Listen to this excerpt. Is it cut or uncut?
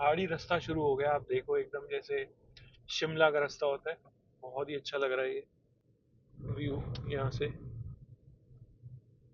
uncut